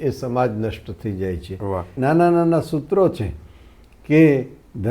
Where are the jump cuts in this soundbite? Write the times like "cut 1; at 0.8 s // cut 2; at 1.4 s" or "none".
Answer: cut 1; at 1.9 s